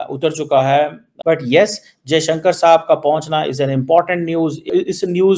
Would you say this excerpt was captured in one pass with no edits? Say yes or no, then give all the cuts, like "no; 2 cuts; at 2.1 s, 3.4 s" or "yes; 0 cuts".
no; 1 cut; at 1.0 s